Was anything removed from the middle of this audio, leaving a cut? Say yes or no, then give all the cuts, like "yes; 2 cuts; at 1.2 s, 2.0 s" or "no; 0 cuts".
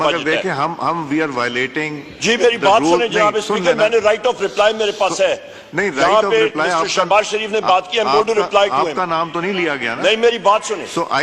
no; 0 cuts